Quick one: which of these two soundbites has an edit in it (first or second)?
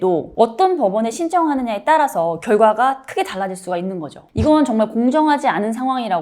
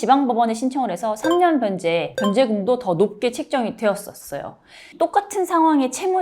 second